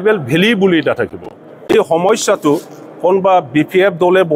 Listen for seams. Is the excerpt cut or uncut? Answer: cut